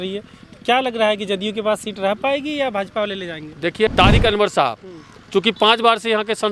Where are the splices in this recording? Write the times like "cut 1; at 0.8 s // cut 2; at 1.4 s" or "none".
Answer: cut 1; at 3.9 s